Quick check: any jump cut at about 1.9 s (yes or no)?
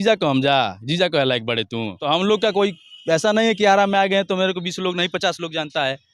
yes